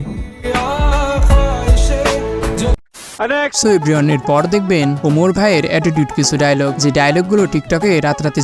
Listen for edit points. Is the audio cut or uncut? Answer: uncut